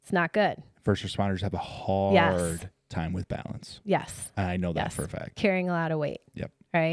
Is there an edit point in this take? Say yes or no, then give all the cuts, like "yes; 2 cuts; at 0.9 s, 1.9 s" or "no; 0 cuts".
no; 0 cuts